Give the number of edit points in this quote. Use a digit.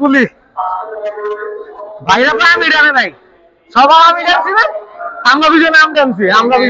0